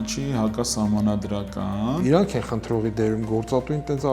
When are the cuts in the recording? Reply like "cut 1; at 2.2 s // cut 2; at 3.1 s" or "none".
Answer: cut 1; at 2.0 s

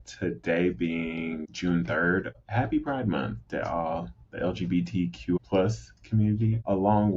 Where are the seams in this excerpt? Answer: none

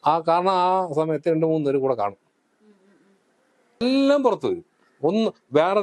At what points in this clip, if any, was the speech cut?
cut 1; at 3.8 s

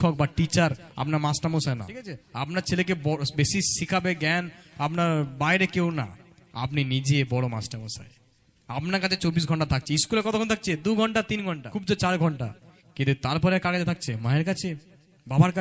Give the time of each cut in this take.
cut 1; at 2.2 s // cut 2; at 11.7 s

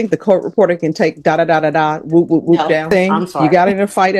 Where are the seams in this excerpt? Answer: cut 1; at 2.9 s

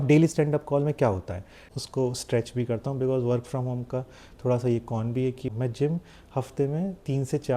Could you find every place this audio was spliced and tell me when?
cut 1; at 1.6 s // cut 2; at 5.4 s

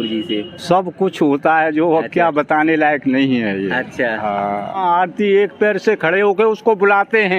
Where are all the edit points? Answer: cut 1; at 4.8 s

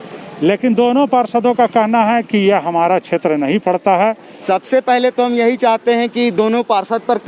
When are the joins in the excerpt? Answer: cut 1; at 4.3 s

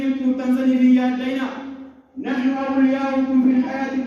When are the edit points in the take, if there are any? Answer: none

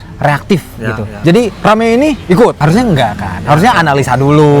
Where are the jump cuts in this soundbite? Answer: cut 1; at 1.0 s

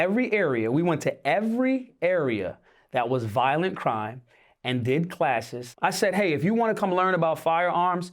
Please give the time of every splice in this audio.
cut 1; at 5.6 s

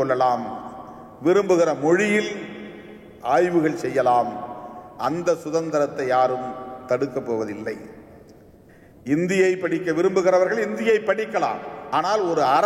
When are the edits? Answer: cut 1; at 11.7 s

